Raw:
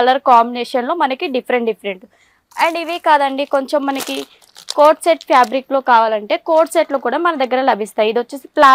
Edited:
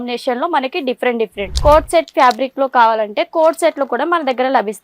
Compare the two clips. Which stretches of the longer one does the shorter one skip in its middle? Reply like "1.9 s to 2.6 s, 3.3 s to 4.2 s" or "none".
1.9 s to 4.6 s